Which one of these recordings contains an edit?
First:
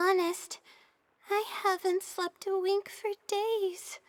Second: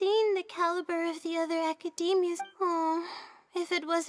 second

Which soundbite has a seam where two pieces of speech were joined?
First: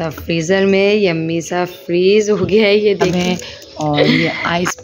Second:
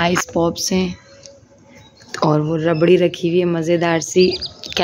first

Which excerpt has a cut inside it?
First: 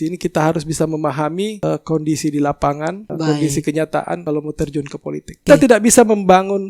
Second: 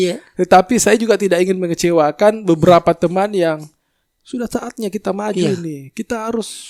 first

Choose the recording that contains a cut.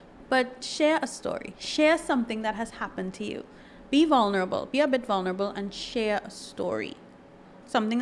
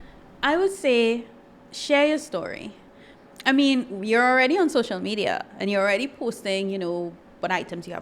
first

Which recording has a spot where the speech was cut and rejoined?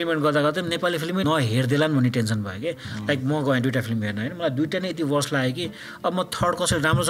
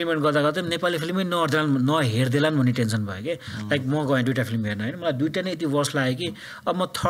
first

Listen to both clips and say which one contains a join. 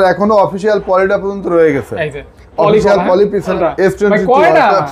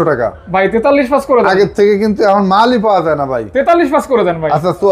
first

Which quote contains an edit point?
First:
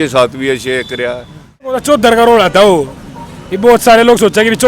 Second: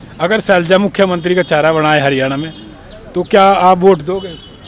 first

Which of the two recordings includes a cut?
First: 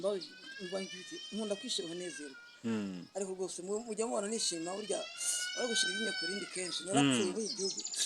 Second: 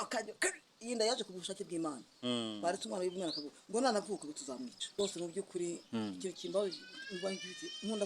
second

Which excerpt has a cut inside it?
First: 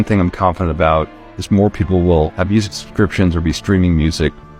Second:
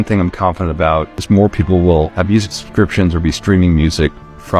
second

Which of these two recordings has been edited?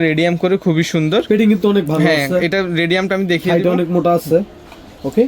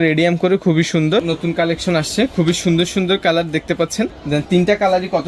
second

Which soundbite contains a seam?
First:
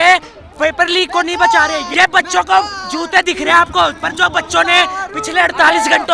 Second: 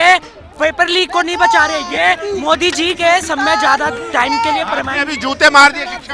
first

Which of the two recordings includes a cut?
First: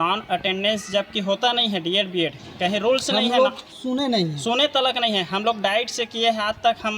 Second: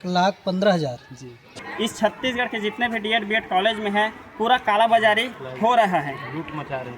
second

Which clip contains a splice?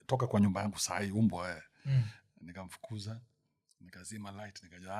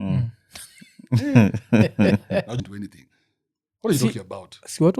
second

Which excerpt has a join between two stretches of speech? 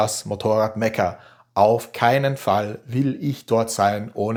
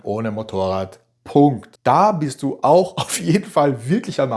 second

